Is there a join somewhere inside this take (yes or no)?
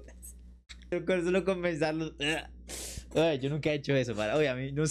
no